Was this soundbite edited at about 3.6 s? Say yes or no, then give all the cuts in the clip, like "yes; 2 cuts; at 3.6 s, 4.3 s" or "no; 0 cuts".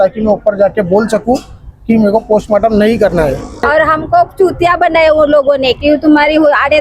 yes; 1 cut; at 3.6 s